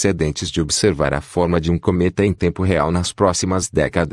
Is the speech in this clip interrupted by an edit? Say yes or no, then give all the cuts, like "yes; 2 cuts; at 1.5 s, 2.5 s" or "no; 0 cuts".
yes; 1 cut; at 1.3 s